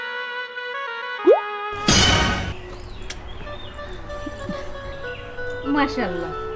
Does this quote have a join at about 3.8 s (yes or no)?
no